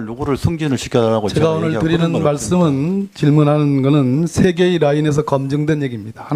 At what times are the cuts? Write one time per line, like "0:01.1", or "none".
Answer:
none